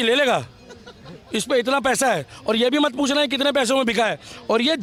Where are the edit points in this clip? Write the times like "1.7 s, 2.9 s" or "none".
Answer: none